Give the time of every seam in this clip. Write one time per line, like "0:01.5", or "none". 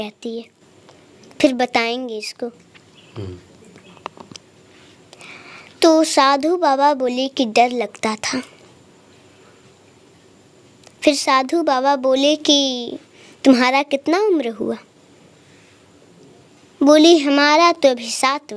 none